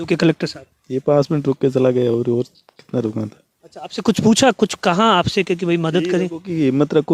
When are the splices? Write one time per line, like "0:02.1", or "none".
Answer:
none